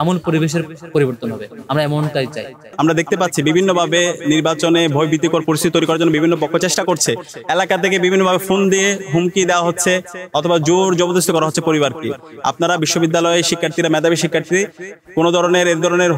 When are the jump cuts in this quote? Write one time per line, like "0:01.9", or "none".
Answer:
0:02.6